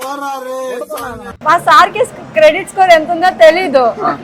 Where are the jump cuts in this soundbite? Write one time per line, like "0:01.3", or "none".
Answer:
0:01.3